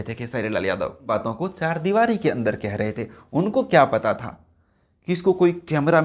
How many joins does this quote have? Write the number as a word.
one